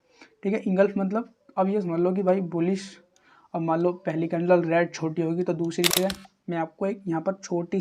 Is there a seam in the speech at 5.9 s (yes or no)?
yes